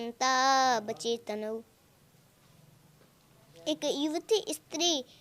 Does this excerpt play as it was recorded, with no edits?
yes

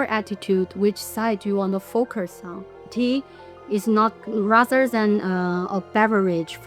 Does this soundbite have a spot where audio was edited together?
yes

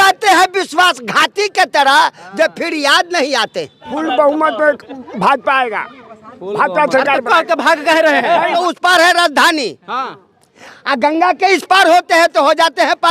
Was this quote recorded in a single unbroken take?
no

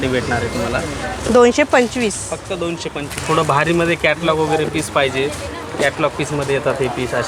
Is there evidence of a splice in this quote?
no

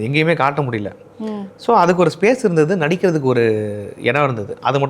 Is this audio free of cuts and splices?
yes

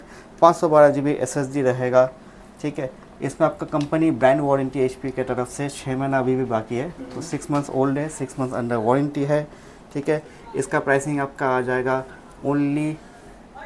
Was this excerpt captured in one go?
yes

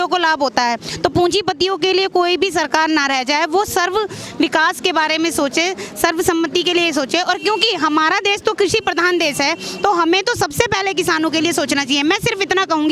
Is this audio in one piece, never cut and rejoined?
yes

